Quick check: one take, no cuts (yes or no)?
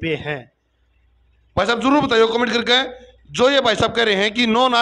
yes